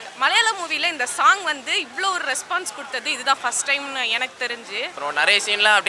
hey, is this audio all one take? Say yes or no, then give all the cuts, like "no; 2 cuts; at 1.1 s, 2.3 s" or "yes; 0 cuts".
no; 1 cut; at 4.9 s